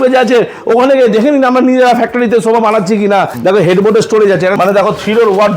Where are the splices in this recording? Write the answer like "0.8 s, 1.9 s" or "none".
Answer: 3.3 s, 4.5 s